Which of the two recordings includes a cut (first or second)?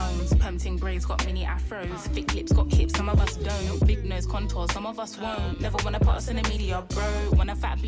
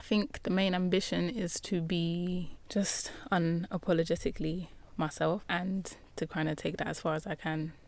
second